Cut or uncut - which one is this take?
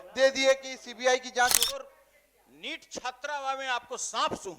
cut